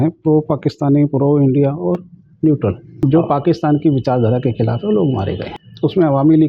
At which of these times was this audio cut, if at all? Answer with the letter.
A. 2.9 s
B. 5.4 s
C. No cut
A